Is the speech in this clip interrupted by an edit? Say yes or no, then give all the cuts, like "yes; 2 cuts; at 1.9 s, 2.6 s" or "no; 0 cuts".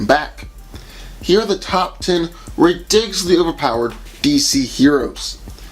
yes; 1 cut; at 1.1 s